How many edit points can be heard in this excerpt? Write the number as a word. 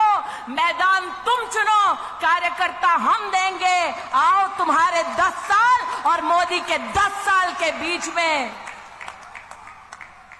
zero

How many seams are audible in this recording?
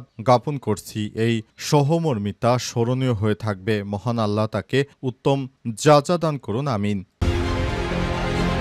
one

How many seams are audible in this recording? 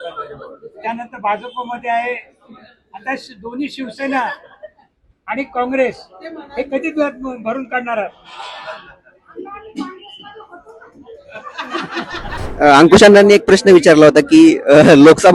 one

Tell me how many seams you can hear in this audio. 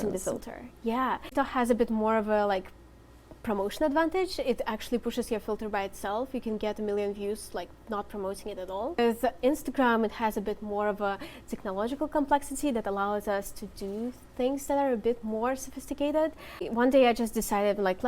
three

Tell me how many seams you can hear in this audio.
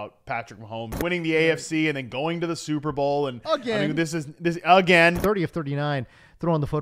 two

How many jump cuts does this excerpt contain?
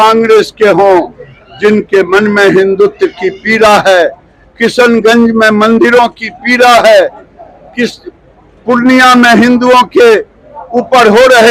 zero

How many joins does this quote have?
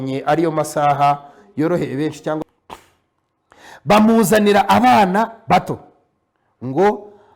one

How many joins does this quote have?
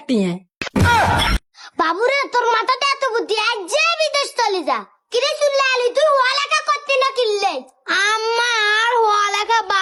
zero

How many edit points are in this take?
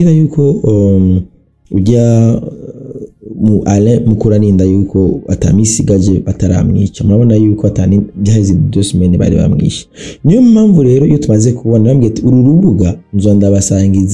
zero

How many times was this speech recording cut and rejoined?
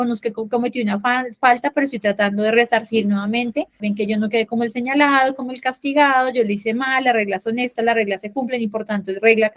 one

